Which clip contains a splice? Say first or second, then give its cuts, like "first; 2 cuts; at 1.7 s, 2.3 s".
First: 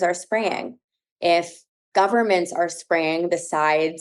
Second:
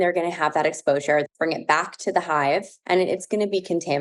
second; 2 cuts; at 1.2 s, 2.7 s